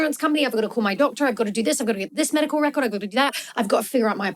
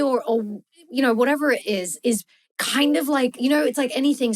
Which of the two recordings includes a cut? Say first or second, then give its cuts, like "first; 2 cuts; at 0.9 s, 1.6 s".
second; 1 cut; at 2.3 s